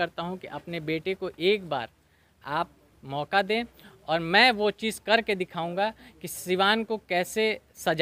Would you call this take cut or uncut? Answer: uncut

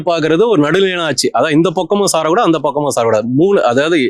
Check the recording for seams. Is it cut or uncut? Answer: uncut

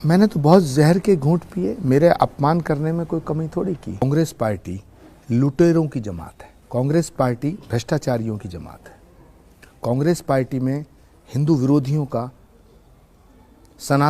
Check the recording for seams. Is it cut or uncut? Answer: cut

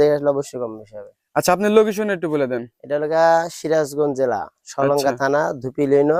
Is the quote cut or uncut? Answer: uncut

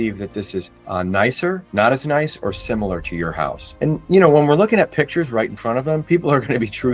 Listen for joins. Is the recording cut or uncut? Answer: uncut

